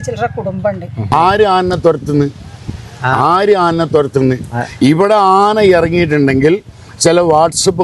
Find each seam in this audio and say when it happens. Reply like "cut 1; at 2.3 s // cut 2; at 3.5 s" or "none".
cut 1; at 1.1 s